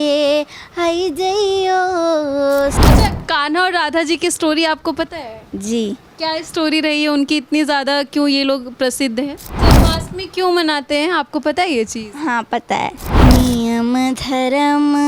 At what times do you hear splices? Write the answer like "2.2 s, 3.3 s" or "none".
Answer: 2.8 s, 9.6 s, 13.0 s